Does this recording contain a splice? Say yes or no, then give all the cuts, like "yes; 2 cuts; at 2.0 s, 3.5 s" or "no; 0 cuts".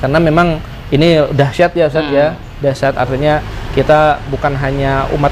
no; 0 cuts